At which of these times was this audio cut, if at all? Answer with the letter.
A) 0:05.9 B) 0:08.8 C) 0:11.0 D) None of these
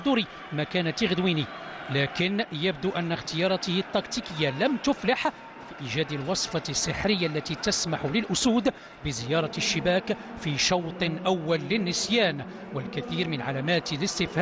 C